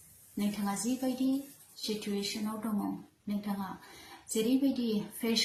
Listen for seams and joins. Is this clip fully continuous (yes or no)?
yes